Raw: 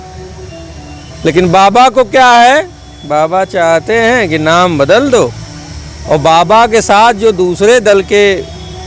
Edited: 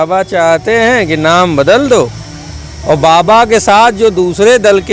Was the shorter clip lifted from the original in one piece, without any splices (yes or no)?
yes